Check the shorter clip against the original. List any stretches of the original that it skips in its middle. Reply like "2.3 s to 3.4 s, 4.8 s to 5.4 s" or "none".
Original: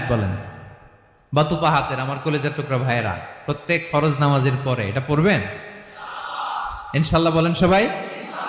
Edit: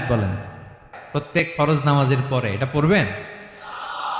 1.4 s to 3.7 s